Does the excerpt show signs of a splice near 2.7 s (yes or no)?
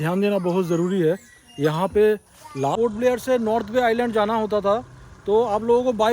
yes